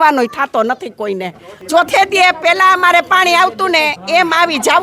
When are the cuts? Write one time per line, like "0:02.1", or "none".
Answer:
none